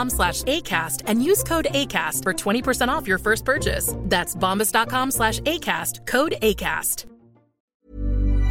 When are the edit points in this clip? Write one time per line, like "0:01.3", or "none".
0:07.5